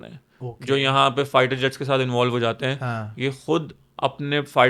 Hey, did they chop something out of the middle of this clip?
no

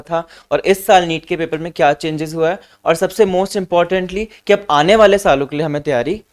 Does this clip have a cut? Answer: no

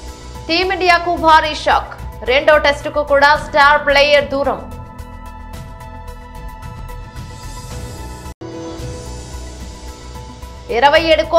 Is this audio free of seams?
no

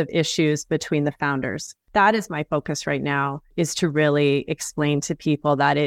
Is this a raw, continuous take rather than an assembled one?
no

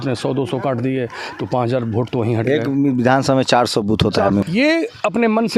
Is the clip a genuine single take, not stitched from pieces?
no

